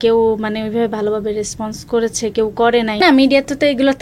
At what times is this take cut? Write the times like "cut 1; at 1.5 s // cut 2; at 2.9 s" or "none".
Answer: cut 1; at 3.0 s